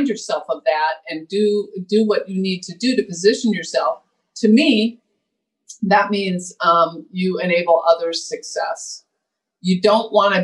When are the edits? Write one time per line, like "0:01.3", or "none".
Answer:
none

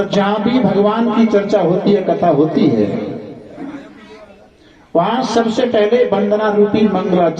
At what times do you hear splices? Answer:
none

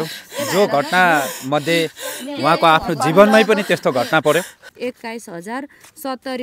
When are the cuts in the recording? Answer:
0:04.6

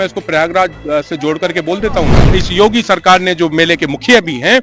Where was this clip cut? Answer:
0:02.2

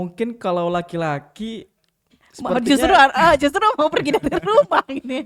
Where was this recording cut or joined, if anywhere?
none

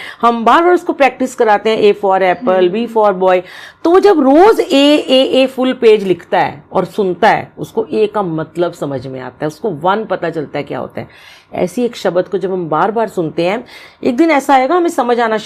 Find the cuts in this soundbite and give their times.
none

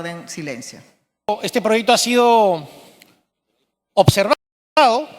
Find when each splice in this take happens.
0:01.3

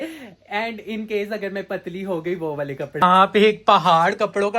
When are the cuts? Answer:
0:03.0

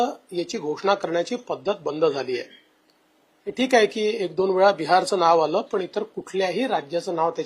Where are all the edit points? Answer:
none

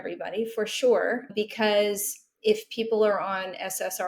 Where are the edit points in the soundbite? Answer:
0:01.3

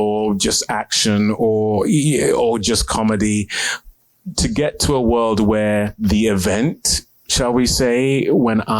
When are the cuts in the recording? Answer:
0:05.9

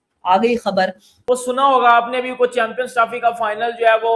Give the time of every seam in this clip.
0:01.1

